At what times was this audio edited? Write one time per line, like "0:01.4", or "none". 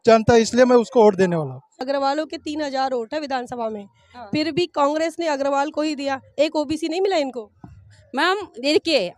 0:01.7